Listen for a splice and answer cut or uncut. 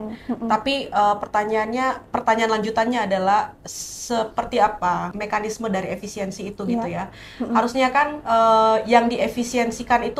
cut